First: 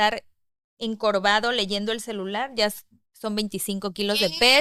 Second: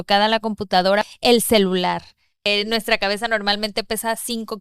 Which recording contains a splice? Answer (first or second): second